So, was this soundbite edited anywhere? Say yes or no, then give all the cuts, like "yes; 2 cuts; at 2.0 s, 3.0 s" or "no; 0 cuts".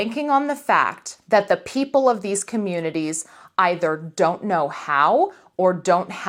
no; 0 cuts